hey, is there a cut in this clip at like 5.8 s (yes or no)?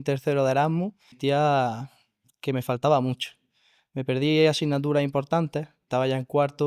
yes